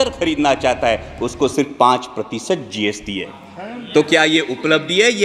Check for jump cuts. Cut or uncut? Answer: uncut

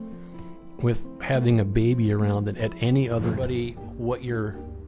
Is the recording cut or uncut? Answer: cut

